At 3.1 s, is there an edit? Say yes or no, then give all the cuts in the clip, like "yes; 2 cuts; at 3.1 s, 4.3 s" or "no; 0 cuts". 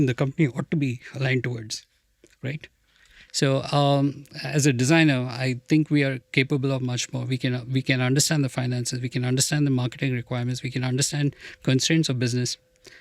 yes; 1 cut; at 3.1 s